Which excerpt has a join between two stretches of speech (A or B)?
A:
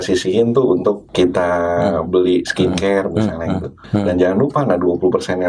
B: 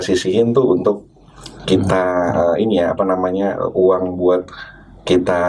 A